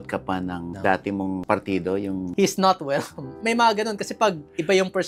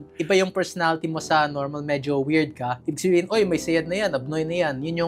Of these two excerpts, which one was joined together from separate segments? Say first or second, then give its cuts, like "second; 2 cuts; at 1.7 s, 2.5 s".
first; 3 cuts; at 1.4 s, 2.3 s, 3.3 s